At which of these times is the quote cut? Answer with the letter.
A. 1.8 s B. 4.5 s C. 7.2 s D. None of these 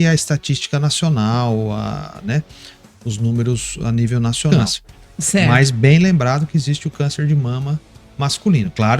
B